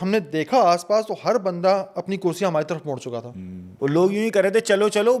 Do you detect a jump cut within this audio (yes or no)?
no